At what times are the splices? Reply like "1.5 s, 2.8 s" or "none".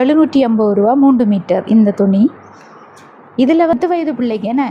3.7 s